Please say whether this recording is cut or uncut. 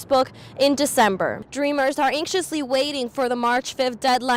cut